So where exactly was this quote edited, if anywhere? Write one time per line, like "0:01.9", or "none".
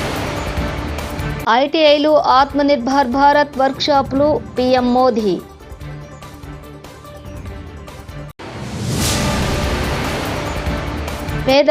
0:01.2